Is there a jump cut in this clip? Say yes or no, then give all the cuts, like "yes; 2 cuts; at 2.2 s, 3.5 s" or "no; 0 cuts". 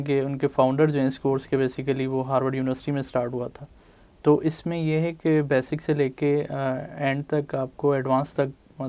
no; 0 cuts